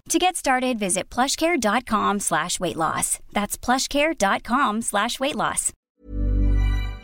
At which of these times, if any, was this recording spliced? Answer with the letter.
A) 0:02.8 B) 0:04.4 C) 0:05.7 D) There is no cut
C